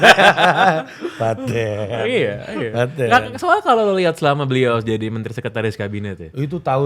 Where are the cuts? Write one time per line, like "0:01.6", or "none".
none

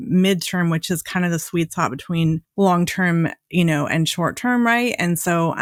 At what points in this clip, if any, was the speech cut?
none

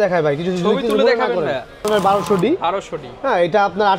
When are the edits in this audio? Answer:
0:01.9

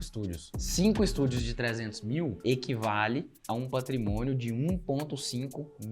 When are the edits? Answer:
0:02.4

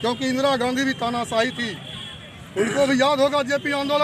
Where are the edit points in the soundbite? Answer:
none

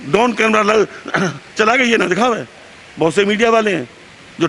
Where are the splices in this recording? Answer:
none

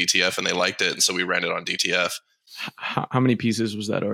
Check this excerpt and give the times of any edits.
none

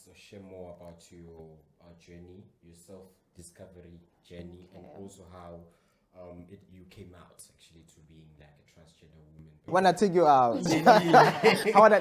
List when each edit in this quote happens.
0:09.6

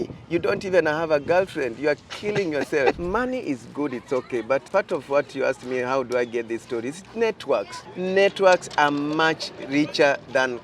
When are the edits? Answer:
0:03.0
0:04.7
0:07.8

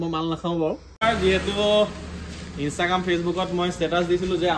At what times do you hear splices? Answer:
0:01.0

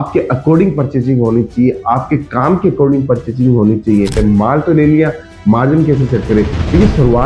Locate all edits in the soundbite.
0:04.2

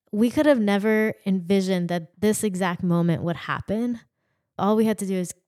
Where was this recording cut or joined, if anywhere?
0:02.1
0:04.6

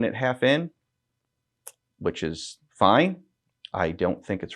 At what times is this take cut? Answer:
none

